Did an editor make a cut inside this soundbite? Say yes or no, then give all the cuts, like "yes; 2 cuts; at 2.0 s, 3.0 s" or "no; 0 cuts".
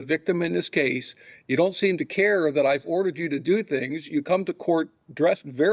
no; 0 cuts